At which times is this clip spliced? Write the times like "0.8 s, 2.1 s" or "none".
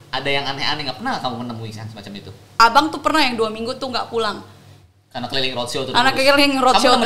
2.6 s